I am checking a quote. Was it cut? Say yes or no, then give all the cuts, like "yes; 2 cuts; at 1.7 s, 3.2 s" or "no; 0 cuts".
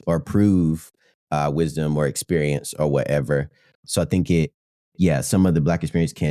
yes; 1 cut; at 3.7 s